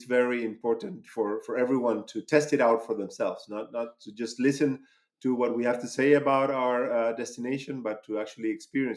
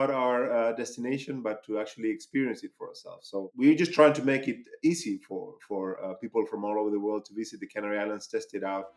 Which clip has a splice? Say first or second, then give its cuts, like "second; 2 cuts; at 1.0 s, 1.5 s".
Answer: second; 1 cut; at 3.5 s